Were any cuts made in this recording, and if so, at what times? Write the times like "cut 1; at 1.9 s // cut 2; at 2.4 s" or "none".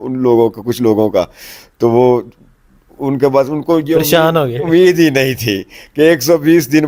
none